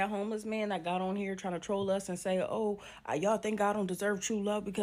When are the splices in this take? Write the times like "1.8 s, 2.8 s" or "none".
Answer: none